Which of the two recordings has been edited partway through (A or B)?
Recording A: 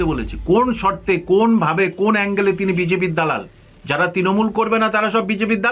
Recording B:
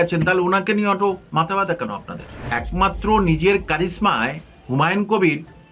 B